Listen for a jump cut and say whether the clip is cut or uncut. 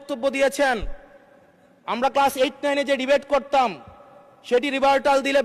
uncut